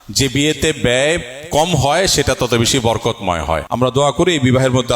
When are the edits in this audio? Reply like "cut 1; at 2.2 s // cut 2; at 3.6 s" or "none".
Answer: cut 1; at 3.6 s

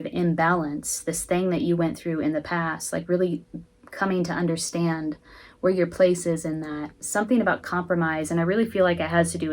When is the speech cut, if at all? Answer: cut 1; at 6.9 s

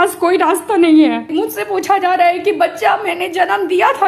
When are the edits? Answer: cut 1; at 1.3 s

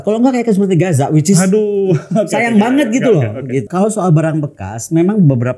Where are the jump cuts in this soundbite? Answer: cut 1; at 3.7 s

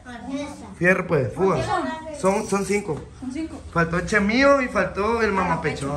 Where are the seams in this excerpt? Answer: none

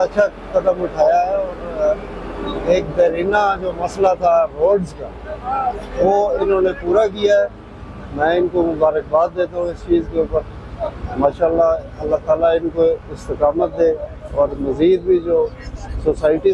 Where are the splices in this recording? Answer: none

